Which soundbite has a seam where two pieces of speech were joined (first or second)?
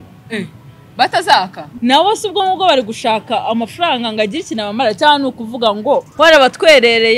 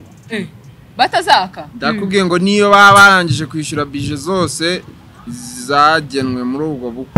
first